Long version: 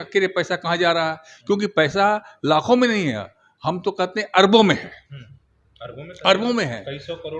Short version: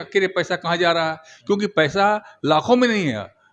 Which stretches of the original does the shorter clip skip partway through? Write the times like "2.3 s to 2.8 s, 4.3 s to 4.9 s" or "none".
none